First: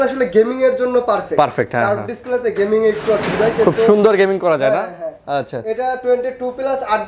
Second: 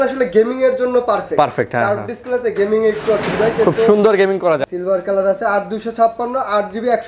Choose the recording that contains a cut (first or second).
second